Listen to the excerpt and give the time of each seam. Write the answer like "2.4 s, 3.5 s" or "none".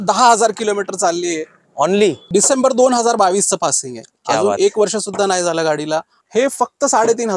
2.2 s, 6.2 s

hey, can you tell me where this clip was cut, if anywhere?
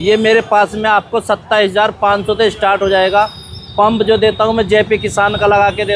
none

